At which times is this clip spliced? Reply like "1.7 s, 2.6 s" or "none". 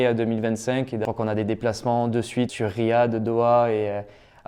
1.0 s, 2.5 s